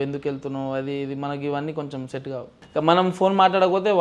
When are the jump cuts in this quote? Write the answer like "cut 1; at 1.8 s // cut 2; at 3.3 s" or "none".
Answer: cut 1; at 2.6 s